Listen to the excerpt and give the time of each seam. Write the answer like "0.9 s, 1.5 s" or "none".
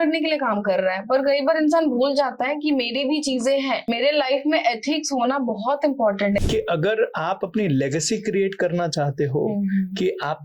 3.8 s, 6.5 s